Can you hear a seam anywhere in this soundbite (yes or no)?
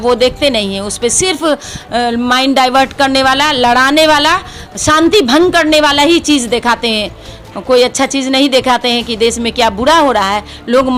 no